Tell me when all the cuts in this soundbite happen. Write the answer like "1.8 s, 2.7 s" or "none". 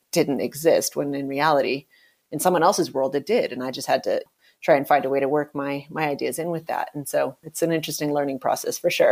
7.4 s